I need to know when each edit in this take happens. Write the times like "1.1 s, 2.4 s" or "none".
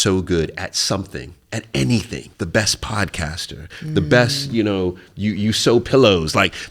2.2 s